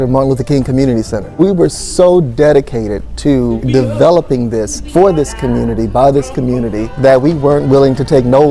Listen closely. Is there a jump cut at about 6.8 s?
yes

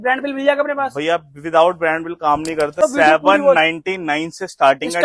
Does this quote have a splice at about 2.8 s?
yes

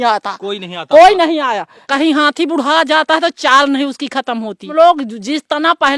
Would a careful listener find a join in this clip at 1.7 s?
yes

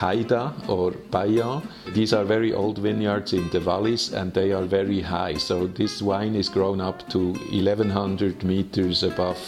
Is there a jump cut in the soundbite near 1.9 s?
yes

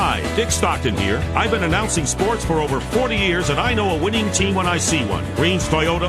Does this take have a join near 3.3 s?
yes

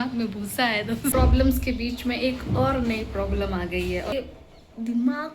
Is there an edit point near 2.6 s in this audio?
no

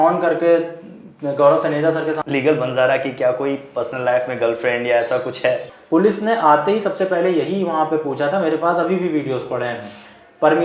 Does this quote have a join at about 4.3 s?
no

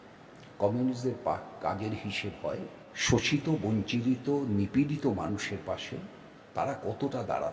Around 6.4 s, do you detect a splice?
no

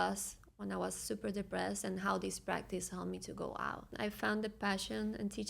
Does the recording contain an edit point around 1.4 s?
no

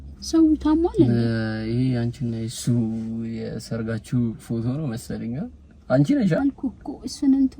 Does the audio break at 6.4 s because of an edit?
yes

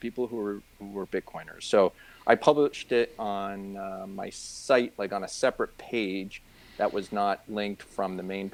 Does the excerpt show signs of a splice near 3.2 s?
no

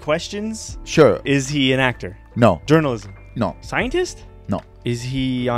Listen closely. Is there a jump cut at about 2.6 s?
yes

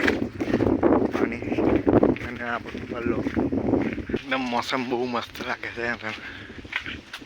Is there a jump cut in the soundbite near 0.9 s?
no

